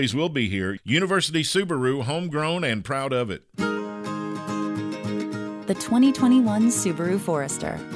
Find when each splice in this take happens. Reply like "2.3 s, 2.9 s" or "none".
3.4 s

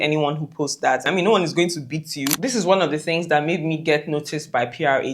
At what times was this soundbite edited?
1.1 s, 2.3 s

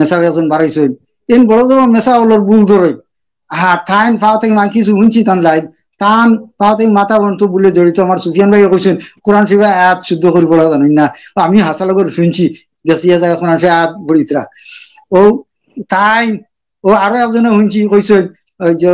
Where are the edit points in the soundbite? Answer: none

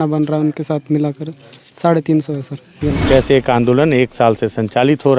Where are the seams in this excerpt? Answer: 3.0 s

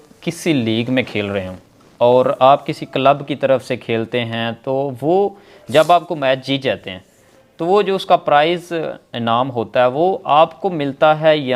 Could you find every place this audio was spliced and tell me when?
none

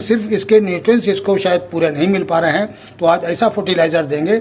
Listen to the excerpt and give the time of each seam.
none

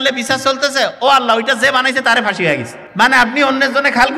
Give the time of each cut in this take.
2.8 s

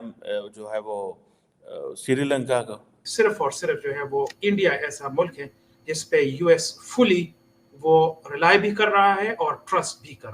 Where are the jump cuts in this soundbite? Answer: 3.0 s

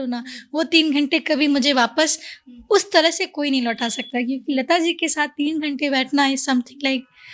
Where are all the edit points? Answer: none

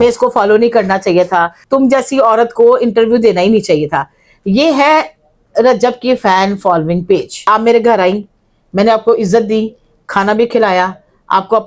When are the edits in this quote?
1.6 s, 7.4 s

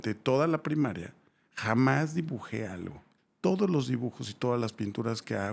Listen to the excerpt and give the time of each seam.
3.0 s

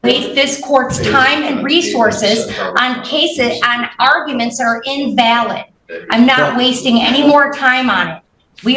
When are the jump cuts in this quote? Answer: none

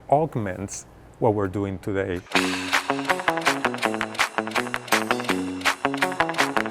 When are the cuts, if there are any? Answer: 2.2 s

